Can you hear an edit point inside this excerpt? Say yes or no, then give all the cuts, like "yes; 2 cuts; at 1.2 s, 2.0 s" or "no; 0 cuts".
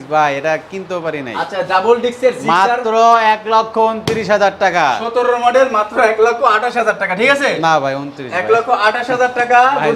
no; 0 cuts